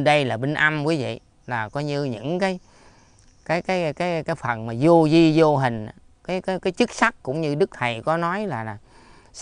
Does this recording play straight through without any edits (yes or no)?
yes